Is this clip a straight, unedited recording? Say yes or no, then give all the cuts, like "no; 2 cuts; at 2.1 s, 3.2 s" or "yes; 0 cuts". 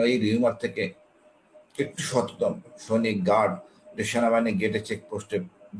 yes; 0 cuts